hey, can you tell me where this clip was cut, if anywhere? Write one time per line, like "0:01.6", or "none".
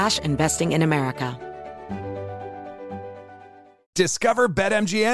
0:01.4